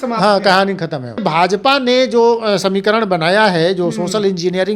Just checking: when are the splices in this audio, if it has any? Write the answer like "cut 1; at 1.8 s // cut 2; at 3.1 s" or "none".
cut 1; at 1.2 s